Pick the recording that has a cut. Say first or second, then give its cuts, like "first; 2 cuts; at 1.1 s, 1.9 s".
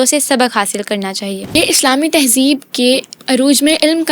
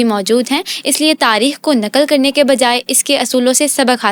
first; 2 cuts; at 1.5 s, 3.1 s